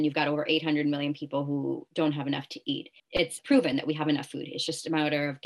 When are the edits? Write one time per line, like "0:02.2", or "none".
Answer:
0:03.4